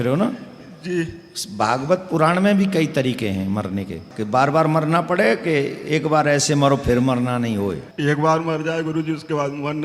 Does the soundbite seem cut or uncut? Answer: cut